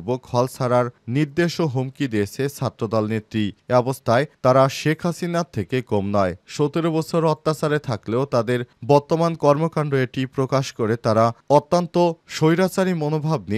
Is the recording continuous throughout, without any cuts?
yes; 0 cuts

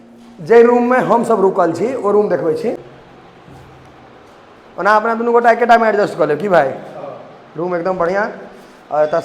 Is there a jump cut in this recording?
yes; 1 cut; at 2.8 s

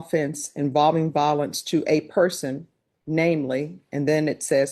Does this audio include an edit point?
no; 0 cuts

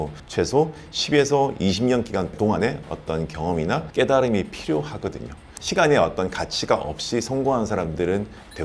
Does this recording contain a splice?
no; 0 cuts

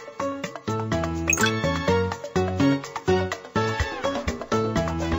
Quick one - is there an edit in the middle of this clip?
no; 0 cuts

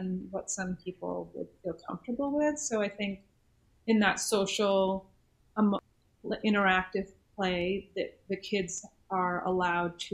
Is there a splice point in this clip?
yes; 1 cut; at 5.9 s

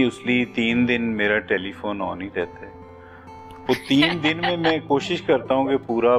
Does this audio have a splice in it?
no; 0 cuts

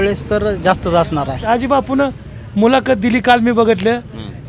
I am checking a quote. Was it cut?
yes; 1 cut; at 1.5 s

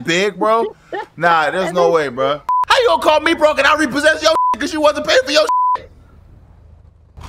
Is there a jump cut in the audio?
yes; 1 cut; at 2.5 s

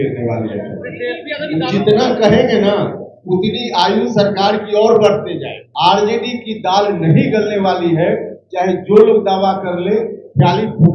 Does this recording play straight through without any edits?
no; 1 cut; at 5.6 s

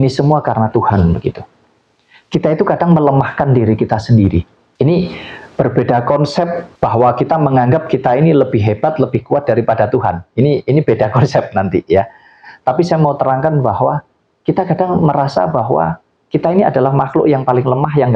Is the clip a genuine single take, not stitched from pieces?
no; 1 cut; at 4.6 s

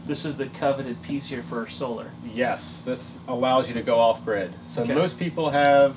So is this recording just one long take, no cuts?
yes; 0 cuts

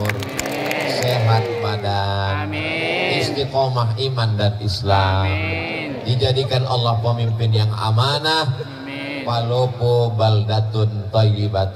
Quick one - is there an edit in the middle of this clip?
no; 0 cuts

